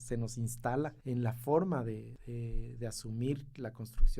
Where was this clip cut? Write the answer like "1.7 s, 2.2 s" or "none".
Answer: 1.0 s, 2.1 s